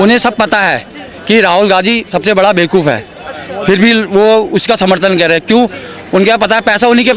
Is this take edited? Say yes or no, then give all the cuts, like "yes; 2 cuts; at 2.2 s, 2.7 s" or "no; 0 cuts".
no; 0 cuts